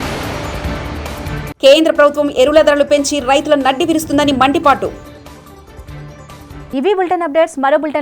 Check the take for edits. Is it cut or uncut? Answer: uncut